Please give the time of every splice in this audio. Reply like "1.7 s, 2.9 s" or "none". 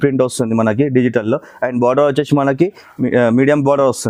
none